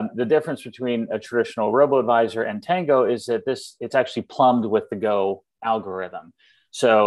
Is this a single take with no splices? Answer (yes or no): yes